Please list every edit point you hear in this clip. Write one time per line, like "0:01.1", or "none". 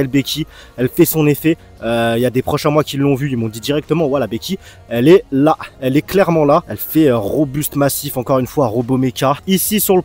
none